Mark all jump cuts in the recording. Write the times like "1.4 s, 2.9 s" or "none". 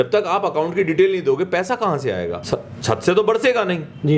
2.4 s